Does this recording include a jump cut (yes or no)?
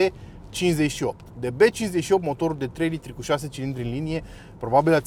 no